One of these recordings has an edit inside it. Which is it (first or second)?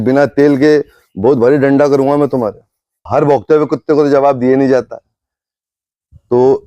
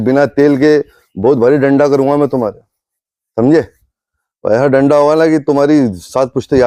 first